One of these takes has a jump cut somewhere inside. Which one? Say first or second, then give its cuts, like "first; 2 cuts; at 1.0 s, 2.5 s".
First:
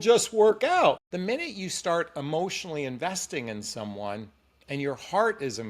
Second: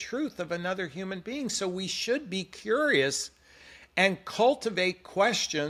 first; 1 cut; at 1.0 s